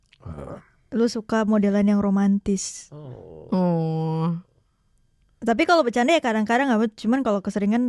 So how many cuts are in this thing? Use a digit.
0